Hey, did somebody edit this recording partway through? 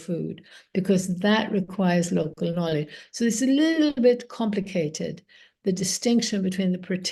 no; 0 cuts

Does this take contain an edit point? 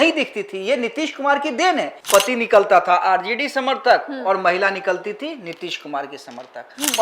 yes; 1 cut; at 2.0 s

